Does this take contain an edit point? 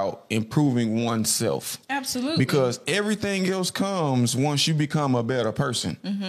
no; 0 cuts

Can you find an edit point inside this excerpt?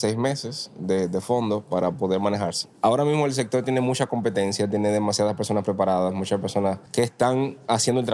yes; 2 cuts; at 2.6 s, 6.8 s

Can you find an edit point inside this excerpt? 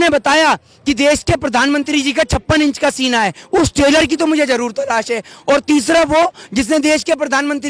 no; 0 cuts

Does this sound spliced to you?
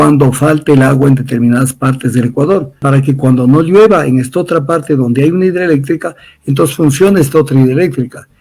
yes; 1 cut; at 2.8 s

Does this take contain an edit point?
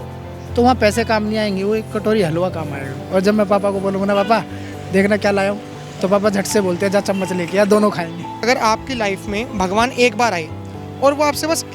yes; 1 cut; at 8.4 s

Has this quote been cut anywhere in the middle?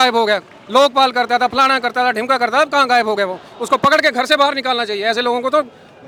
no; 0 cuts

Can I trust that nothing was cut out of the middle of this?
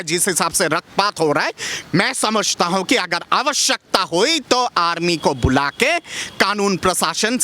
yes; 0 cuts

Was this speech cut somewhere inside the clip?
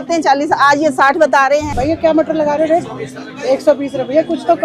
yes; 1 cut; at 1.7 s

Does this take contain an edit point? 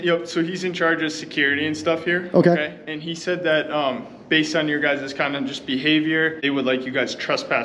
yes; 1 cut; at 6.4 s

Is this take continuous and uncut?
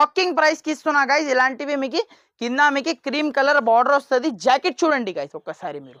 yes; 0 cuts

